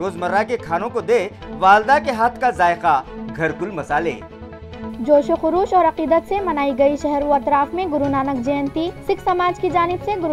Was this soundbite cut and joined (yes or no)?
no